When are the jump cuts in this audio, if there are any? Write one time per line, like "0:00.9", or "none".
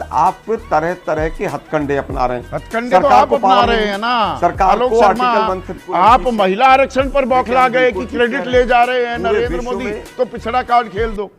0:05.7